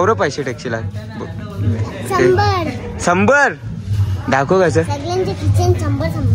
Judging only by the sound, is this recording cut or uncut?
uncut